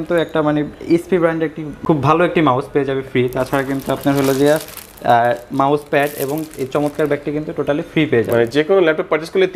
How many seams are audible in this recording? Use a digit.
1